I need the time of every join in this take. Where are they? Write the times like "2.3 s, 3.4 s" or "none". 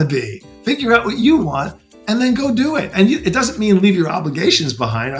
none